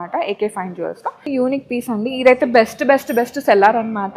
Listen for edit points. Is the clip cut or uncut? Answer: cut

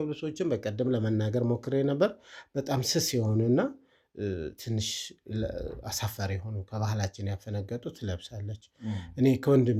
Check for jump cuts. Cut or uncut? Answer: uncut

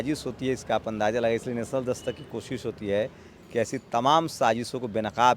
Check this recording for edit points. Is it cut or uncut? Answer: uncut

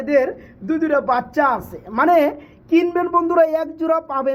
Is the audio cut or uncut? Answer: uncut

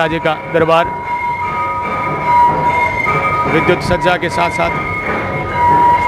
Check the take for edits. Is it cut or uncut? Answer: uncut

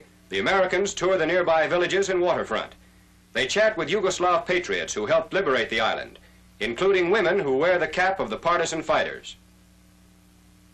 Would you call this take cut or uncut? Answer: cut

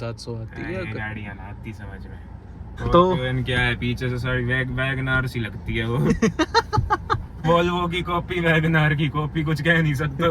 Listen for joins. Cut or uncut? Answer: cut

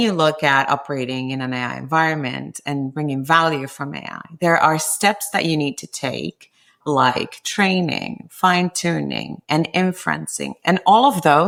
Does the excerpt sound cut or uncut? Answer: uncut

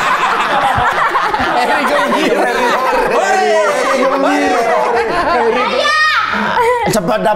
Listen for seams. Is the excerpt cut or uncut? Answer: cut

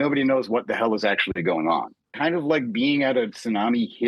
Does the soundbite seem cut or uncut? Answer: cut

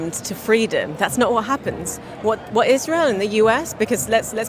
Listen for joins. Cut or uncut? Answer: uncut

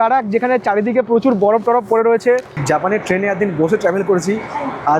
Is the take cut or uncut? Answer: cut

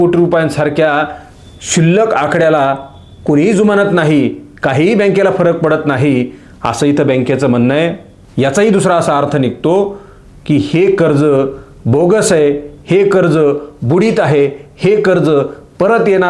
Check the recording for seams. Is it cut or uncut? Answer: uncut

